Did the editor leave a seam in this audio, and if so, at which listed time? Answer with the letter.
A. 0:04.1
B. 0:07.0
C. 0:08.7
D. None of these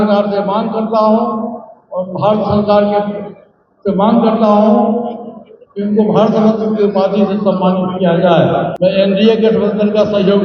C